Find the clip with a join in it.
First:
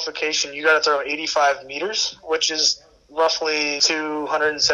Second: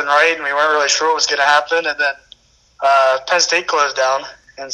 first; 1 cut; at 3.8 s

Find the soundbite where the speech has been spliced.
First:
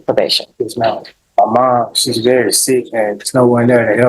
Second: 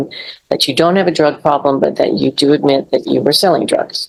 first; 1 cut; at 1.1 s

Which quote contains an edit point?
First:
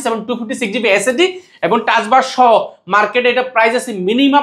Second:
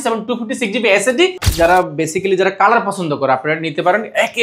second; 1 cut; at 1.4 s

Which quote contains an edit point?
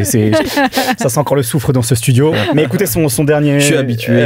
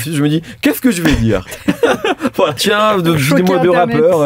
second; 1 cut; at 2.6 s

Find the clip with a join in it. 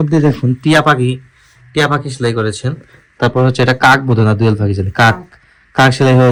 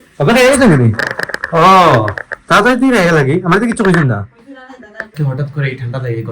second; 1 cut; at 5.1 s

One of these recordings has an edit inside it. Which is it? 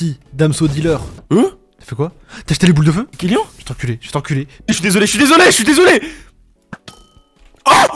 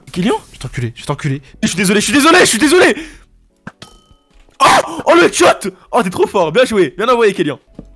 first; 1 cut; at 1.1 s

